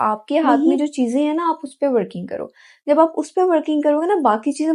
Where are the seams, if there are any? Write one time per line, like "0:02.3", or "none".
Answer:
none